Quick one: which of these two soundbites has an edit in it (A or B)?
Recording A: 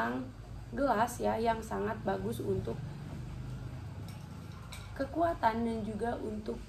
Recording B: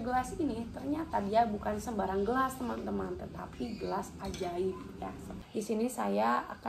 B